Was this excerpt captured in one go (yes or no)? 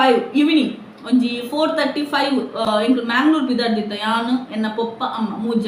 yes